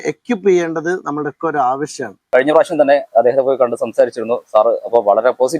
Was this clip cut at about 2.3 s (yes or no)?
yes